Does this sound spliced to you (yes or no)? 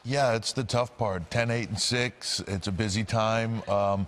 yes